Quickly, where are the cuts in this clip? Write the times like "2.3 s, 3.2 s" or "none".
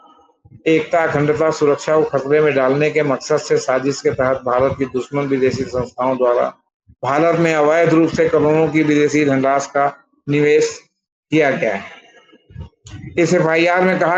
none